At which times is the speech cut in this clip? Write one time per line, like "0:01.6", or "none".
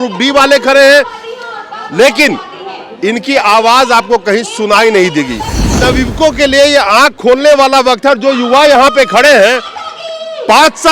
0:05.8